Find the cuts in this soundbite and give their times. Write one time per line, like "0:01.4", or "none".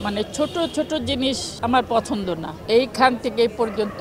0:02.6